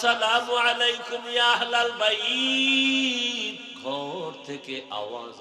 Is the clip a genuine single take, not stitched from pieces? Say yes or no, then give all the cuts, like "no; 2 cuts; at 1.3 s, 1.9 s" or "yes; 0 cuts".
no; 1 cut; at 3.7 s